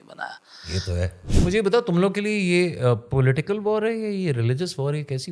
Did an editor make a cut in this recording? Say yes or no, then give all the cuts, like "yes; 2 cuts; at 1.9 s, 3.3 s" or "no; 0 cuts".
yes; 1 cut; at 1.2 s